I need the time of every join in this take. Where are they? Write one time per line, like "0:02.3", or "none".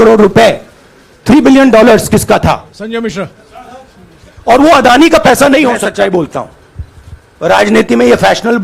0:02.7
0:05.9